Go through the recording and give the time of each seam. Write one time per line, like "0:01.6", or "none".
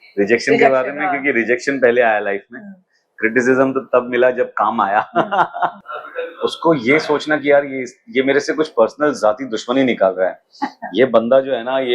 0:05.8